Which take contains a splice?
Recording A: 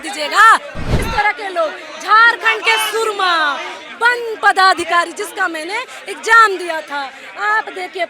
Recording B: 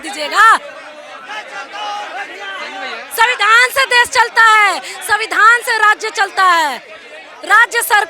A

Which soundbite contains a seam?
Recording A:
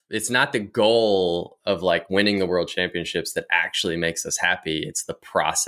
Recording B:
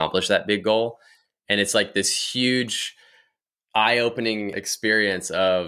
B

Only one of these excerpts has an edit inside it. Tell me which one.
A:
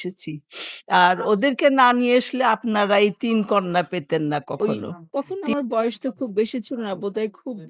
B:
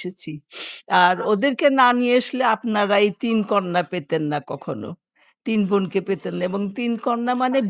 A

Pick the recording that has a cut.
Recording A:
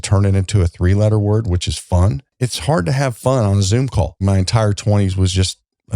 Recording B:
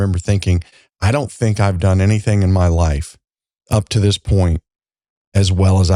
A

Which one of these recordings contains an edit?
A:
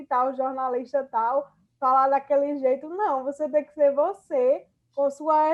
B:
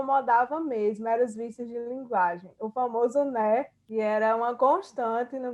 B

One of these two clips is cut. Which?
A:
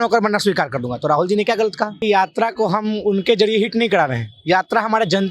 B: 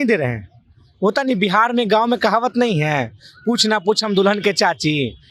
A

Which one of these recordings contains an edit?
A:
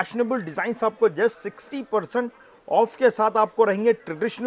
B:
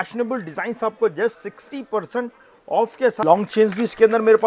B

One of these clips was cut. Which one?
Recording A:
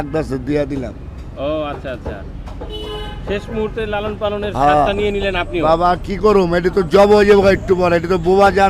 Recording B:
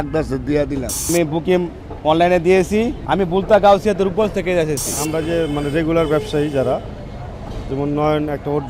B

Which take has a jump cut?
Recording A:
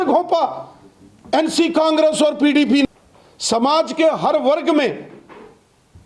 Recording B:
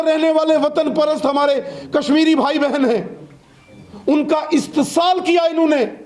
A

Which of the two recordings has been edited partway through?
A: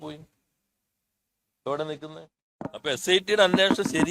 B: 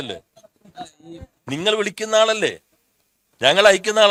A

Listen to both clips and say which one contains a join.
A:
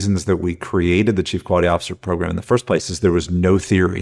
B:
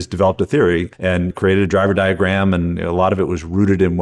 B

